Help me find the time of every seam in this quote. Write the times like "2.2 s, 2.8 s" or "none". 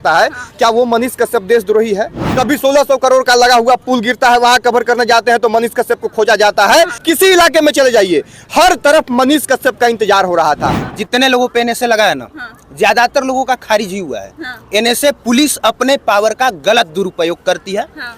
2.2 s, 7.0 s, 10.8 s

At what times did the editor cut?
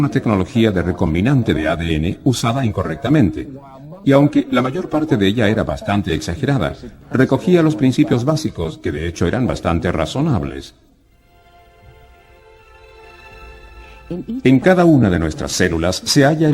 13.2 s

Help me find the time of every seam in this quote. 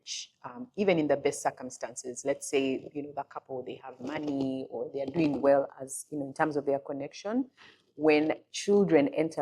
8.5 s

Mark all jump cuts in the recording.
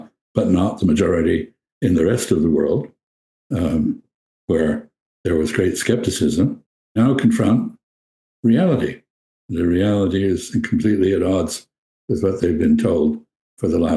7.0 s

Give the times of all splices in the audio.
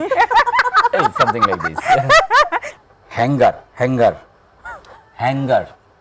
2.7 s

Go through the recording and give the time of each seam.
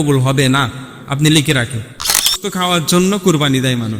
2.4 s

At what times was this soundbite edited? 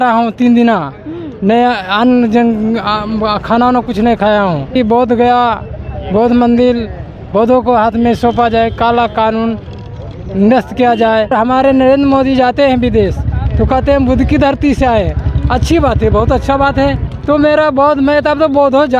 4.8 s, 11.3 s, 17.1 s

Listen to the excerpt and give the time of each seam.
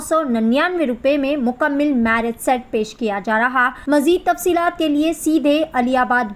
3.8 s

